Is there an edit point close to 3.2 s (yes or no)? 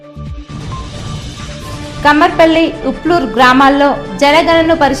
no